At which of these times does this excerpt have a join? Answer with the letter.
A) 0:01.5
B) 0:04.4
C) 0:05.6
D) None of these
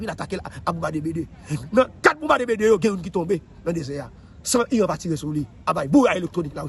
D